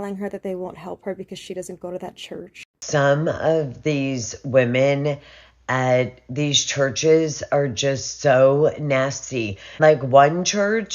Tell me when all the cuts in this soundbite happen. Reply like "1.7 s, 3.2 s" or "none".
2.8 s

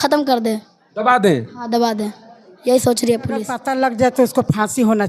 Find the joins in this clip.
3.6 s

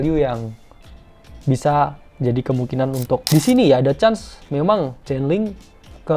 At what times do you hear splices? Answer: 3.2 s

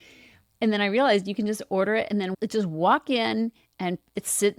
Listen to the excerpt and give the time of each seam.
2.3 s

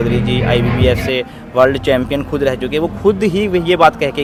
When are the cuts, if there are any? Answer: none

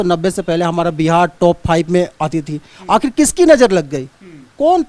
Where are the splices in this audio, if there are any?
none

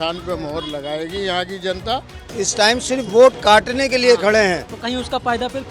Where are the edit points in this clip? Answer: 2.4 s

